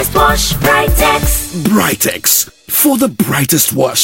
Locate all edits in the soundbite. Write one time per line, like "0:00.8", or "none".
none